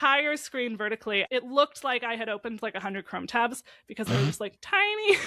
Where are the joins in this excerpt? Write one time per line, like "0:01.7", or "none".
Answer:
0:01.2